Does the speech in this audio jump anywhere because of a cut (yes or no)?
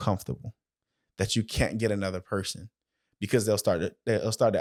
no